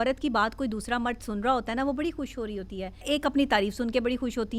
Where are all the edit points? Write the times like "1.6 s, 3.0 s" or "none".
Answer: 3.0 s